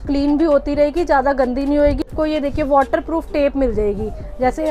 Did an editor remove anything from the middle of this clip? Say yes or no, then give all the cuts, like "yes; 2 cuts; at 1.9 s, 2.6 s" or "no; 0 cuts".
yes; 1 cut; at 2.1 s